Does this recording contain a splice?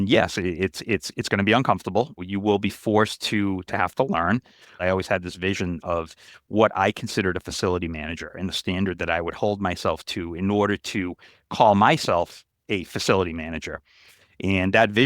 yes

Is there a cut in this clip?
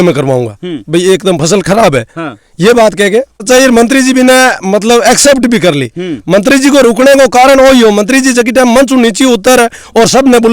yes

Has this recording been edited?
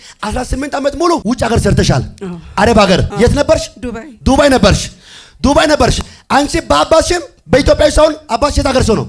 yes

